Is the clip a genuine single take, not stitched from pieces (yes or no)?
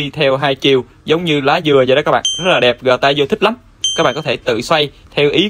yes